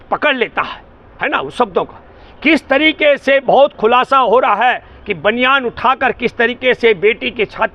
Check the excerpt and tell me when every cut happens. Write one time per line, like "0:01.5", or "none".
none